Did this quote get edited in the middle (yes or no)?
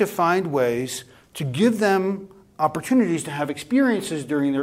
no